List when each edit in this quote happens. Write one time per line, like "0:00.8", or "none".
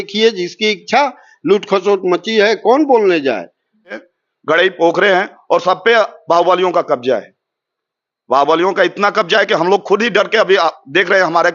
0:04.1